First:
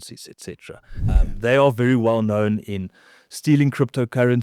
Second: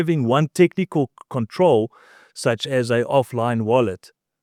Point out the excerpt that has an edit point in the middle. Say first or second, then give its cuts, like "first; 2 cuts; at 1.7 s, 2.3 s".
first; 1 cut; at 1.1 s